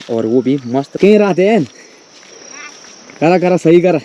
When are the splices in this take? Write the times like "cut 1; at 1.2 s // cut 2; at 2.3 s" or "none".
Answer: cut 1; at 0.9 s